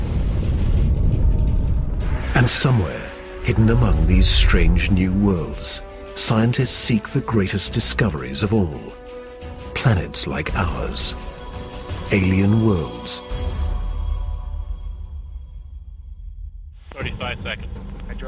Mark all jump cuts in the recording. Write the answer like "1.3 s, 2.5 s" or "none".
none